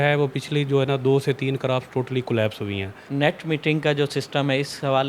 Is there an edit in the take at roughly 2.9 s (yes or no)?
yes